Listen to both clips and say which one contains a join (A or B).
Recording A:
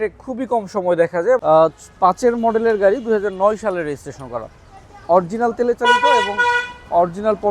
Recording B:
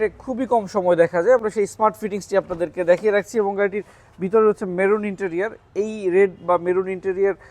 A